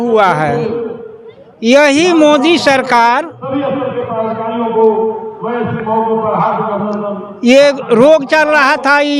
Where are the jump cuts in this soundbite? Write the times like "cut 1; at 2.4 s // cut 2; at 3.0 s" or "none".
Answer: none